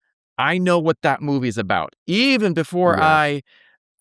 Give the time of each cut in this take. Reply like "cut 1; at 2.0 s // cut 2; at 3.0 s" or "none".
none